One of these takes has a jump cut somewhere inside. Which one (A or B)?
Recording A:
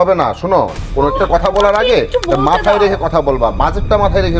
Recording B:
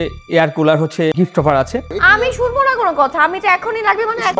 B